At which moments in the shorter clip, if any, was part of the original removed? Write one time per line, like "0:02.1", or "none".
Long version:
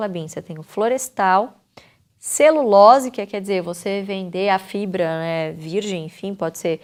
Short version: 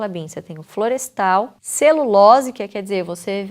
0:01.6

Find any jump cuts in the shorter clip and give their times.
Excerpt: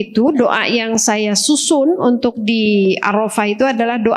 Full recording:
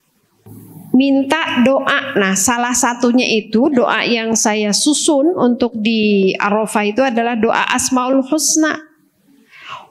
none

